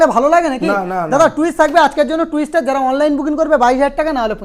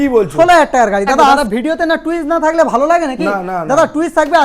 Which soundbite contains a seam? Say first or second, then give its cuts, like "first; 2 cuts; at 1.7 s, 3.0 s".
second; 1 cut; at 1.4 s